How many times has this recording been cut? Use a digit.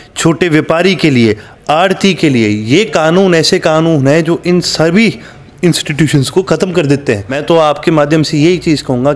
1